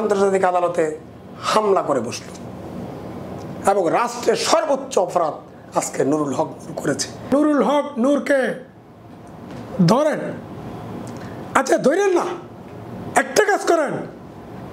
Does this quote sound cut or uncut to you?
cut